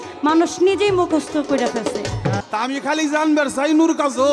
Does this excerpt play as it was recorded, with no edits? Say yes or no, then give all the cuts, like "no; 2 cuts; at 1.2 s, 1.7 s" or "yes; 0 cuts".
no; 1 cut; at 2.4 s